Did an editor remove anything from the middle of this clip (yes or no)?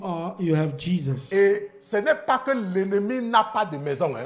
no